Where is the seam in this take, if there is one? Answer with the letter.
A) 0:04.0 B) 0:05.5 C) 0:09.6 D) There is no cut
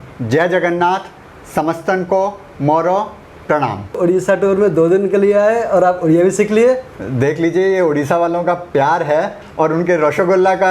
A